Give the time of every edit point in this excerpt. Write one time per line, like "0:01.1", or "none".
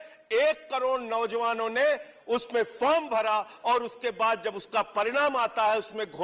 none